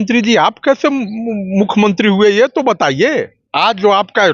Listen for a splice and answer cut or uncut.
cut